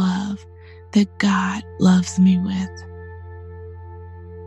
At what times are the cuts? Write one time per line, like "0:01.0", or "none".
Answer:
0:02.7

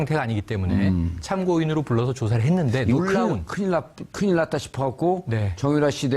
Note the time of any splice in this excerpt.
0:03.7

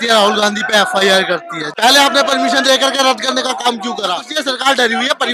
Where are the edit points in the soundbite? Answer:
0:01.6
0:04.3

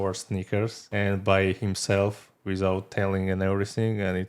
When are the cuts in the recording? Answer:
0:00.9

